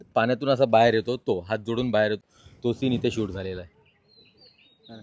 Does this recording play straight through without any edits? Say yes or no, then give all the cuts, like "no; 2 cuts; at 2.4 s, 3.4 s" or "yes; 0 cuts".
no; 1 cut; at 3.6 s